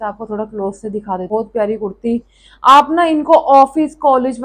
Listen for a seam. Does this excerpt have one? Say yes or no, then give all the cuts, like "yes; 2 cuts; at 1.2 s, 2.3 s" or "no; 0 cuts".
yes; 1 cut; at 1.3 s